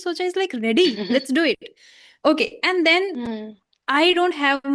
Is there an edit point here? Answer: no; 0 cuts

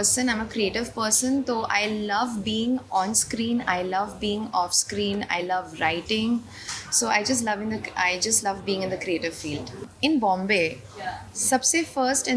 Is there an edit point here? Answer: yes; 1 cut; at 9.9 s

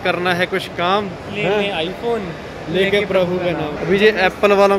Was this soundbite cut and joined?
yes; 2 cuts; at 1.2 s, 3.7 s

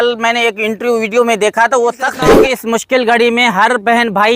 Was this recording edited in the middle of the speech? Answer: yes; 1 cut; at 2.3 s

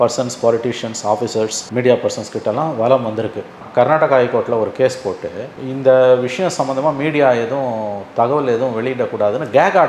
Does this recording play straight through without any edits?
no; 1 cut; at 3.6 s

